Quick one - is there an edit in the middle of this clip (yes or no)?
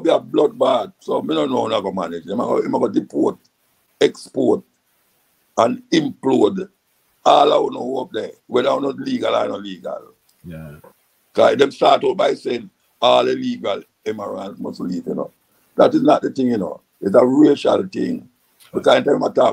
yes